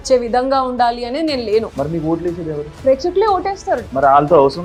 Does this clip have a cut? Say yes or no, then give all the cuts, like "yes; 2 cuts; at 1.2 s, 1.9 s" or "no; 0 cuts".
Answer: no; 0 cuts